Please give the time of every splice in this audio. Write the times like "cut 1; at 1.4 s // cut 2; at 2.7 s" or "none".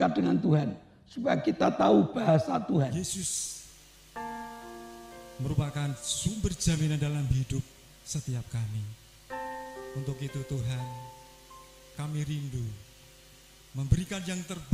cut 1; at 2.9 s